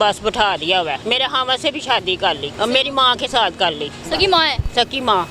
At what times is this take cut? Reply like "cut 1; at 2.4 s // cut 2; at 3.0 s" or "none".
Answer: cut 1; at 1.0 s // cut 2; at 2.5 s // cut 3; at 4.0 s